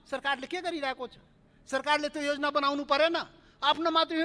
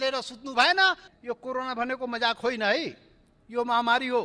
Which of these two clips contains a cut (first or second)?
second